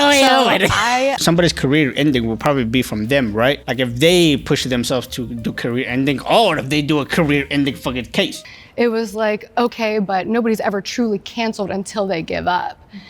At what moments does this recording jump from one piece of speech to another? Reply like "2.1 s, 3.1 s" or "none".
1.2 s, 8.4 s